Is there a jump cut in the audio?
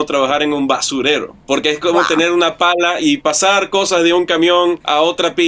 no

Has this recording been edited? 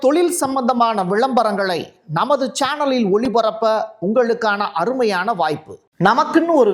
yes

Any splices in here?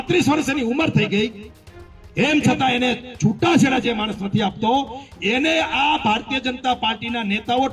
no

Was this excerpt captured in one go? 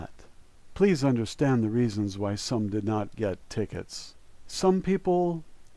no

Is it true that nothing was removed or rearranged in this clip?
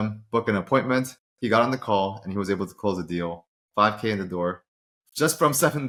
yes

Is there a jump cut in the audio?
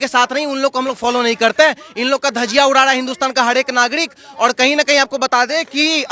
no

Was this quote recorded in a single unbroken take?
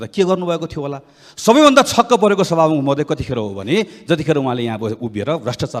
yes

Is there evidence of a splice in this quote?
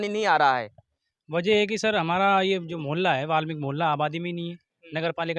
no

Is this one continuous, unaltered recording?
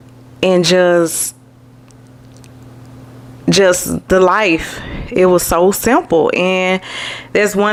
yes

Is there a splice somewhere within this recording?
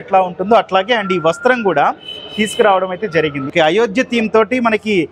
yes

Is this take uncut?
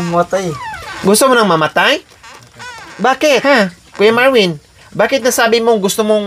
no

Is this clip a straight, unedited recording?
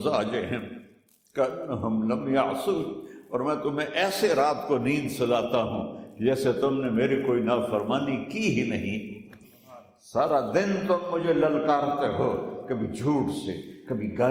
yes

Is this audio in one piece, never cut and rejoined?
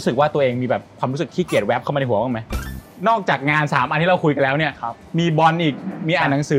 no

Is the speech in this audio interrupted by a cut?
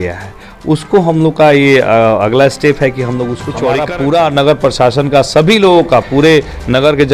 yes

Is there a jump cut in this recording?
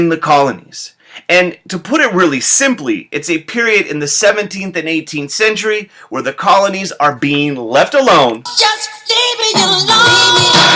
yes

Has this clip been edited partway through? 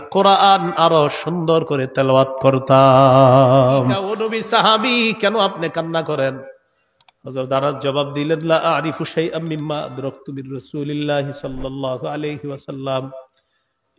yes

